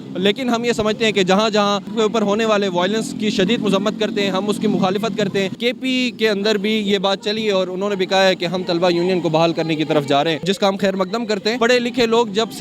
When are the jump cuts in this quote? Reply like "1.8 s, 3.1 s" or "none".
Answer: 1.9 s, 5.6 s, 10.4 s, 11.6 s